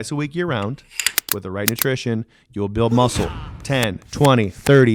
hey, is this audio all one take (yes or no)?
yes